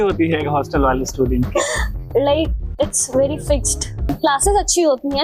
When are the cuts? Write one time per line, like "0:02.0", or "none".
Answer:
0:04.1